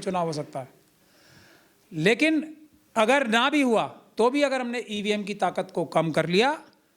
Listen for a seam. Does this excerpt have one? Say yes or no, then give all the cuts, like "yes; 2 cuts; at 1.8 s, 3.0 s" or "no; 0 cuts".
no; 0 cuts